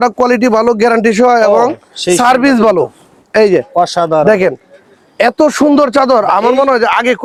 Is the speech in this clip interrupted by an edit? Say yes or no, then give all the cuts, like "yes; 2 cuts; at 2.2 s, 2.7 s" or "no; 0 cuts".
no; 0 cuts